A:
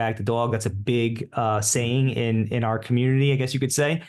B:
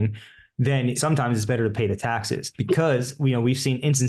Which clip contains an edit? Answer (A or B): B